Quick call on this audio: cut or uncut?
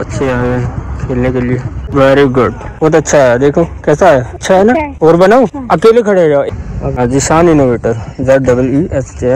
cut